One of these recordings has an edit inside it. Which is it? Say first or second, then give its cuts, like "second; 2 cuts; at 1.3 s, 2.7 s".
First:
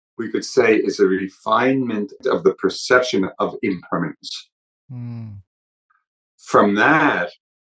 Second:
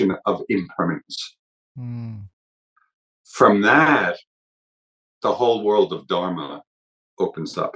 first; 1 cut; at 2.2 s